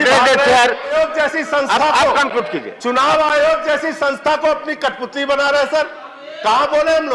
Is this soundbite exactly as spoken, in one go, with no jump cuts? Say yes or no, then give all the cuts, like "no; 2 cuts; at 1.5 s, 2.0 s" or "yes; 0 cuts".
no; 1 cut; at 0.9 s